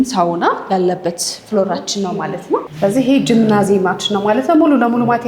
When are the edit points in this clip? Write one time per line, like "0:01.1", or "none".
0:02.7